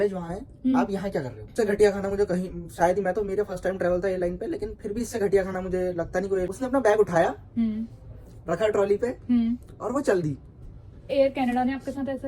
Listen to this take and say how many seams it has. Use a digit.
3